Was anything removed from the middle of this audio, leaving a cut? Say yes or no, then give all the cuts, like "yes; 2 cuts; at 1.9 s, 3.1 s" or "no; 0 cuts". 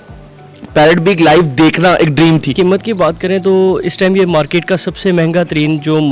yes; 1 cut; at 2.5 s